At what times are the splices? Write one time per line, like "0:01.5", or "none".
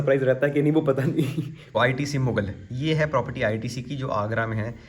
0:01.5